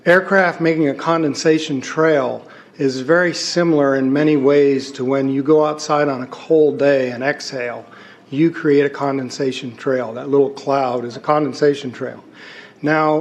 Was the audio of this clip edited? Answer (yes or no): no